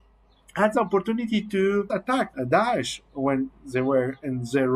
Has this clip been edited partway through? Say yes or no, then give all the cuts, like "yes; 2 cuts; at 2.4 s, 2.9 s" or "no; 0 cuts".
yes; 1 cut; at 2.2 s